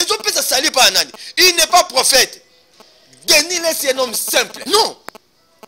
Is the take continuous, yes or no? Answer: no